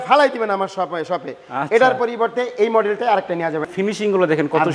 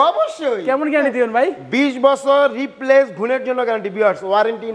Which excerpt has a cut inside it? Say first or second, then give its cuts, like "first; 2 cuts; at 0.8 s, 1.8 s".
first; 1 cut; at 3.7 s